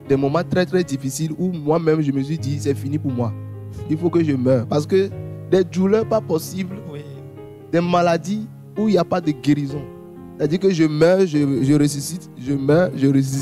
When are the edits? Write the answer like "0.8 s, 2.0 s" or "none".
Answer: none